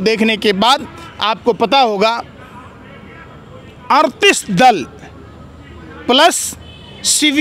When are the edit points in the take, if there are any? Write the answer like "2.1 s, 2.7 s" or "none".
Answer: none

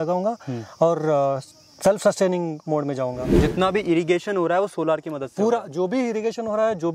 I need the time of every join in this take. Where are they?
3.4 s

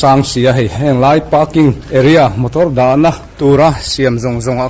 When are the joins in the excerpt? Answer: 1.8 s, 3.3 s

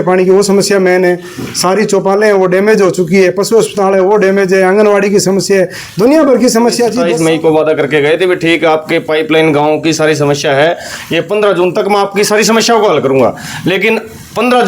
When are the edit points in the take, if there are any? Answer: 7.0 s

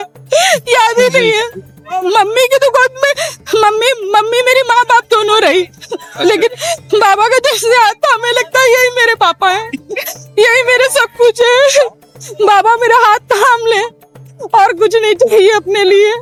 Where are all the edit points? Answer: none

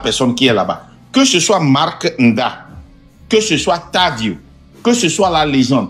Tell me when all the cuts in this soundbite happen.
none

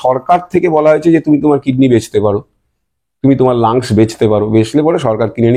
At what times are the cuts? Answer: none

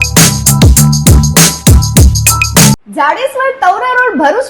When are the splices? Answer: 2.8 s

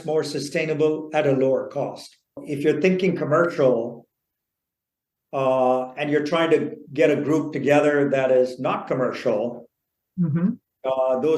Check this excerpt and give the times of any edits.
2.4 s

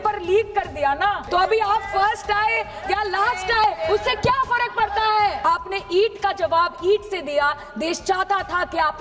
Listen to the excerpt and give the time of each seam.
1.2 s, 5.4 s

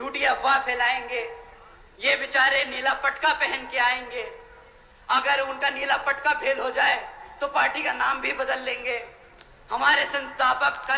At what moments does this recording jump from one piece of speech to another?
none

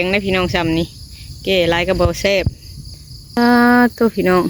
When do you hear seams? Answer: 3.4 s

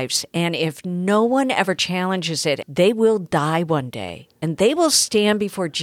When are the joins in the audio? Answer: 2.7 s

